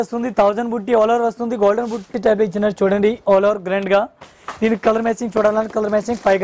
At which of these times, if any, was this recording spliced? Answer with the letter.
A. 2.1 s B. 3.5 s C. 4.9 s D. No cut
A